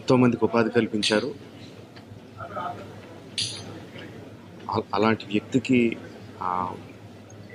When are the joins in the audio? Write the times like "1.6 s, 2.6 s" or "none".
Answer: none